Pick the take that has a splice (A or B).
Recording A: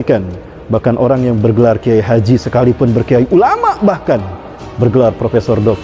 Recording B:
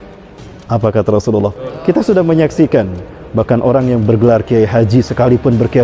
B